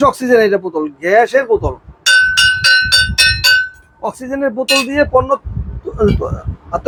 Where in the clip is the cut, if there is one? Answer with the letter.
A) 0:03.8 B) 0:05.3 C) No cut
C